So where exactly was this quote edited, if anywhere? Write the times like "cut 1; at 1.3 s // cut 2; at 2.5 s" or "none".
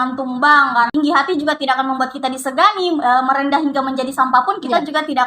cut 1; at 0.9 s